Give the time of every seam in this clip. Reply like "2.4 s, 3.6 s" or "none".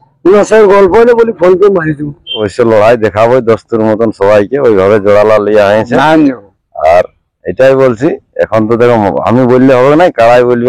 2.5 s